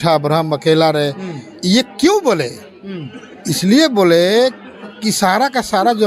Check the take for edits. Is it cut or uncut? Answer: uncut